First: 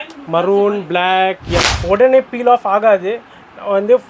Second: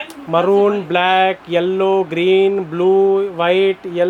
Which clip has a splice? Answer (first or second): first